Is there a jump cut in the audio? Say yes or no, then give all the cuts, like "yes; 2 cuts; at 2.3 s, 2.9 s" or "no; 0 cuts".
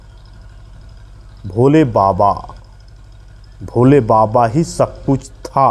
no; 0 cuts